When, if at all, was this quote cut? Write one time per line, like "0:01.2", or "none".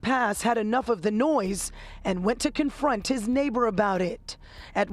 0:01.7